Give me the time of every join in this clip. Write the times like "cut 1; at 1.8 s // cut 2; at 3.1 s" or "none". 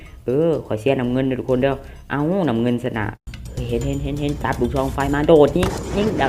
cut 1; at 3.2 s